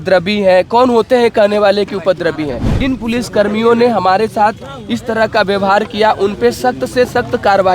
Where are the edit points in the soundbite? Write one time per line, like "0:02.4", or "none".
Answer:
0:02.7